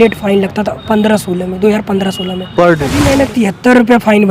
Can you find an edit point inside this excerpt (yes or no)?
yes